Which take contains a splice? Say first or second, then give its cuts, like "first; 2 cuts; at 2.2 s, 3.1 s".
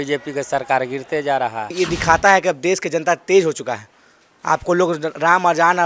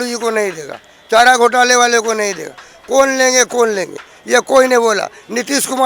first; 1 cut; at 1.7 s